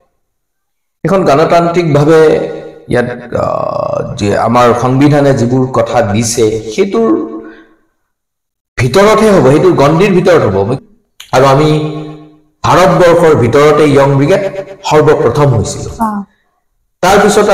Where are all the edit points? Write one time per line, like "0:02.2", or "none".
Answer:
0:10.8